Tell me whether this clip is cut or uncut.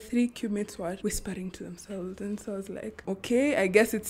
cut